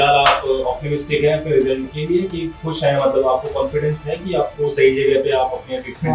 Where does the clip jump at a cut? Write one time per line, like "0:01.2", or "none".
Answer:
none